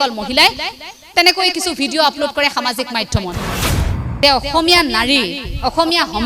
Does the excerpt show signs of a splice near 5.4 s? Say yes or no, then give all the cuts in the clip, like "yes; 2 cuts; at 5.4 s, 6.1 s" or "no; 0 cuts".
no; 1 cut; at 3.6 s